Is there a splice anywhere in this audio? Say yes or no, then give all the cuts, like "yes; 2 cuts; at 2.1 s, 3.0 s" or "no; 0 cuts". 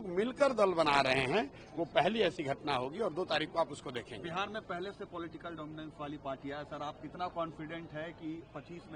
no; 0 cuts